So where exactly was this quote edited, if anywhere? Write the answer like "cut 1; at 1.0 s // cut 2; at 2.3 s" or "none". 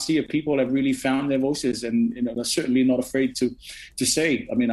none